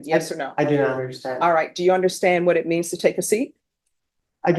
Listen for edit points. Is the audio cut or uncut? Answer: uncut